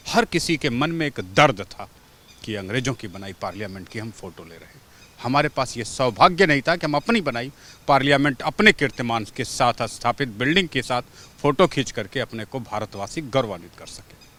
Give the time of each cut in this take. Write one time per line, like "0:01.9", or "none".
none